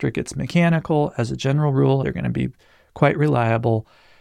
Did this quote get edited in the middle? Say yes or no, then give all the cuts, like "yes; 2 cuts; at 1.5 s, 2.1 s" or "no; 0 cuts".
yes; 1 cut; at 2.0 s